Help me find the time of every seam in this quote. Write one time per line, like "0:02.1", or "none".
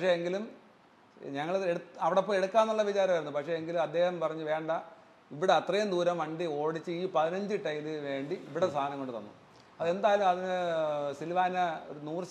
none